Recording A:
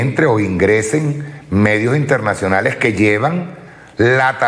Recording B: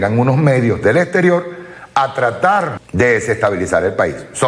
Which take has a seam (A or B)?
B